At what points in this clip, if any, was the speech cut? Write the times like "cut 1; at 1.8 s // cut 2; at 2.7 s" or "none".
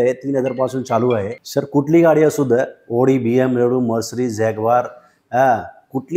cut 1; at 1.3 s